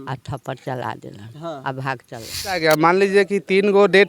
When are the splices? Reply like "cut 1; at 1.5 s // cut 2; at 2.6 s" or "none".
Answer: cut 1; at 2.6 s